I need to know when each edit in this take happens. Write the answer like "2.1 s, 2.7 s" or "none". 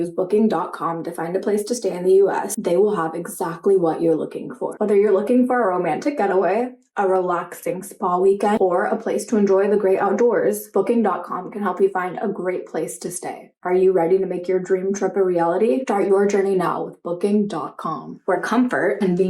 4.6 s

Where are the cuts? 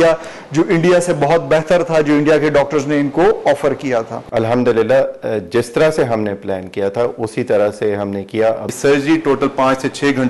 4.3 s, 8.7 s

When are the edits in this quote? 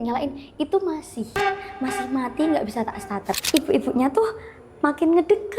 3.4 s

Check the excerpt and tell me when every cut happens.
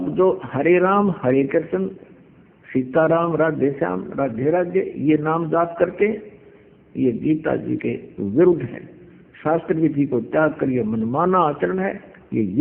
none

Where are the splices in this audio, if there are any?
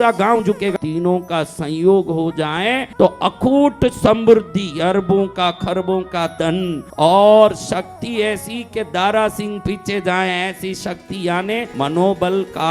0.7 s, 2.8 s, 6.8 s, 11.7 s

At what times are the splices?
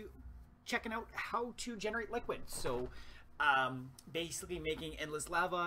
2.4 s

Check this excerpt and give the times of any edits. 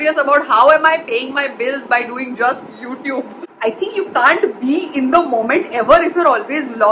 3.4 s

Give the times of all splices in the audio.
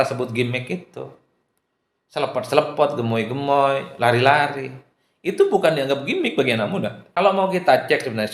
7.0 s

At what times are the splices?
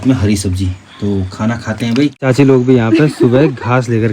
2.2 s

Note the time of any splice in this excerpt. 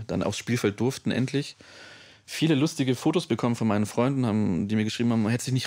none

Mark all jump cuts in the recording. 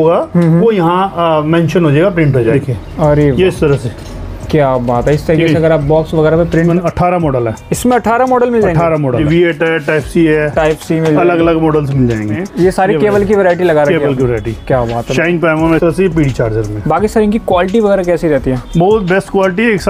2.5 s, 6.7 s, 9.2 s, 12.4 s, 15.8 s

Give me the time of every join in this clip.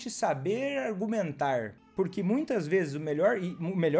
1.8 s

